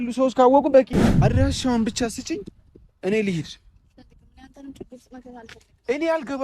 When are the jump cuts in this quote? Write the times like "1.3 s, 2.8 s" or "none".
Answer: 1.1 s